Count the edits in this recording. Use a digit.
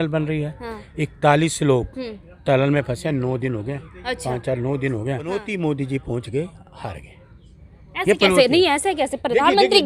1